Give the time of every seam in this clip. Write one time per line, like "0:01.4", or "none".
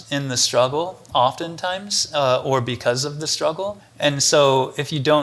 0:03.9